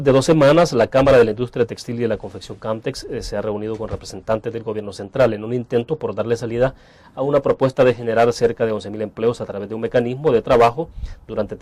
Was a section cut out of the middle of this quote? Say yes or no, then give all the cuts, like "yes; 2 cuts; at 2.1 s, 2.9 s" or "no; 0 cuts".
no; 0 cuts